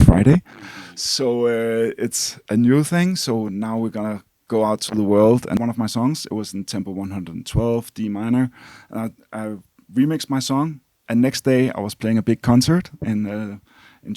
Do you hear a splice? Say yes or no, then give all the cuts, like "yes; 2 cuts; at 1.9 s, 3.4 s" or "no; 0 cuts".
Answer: yes; 1 cut; at 5.6 s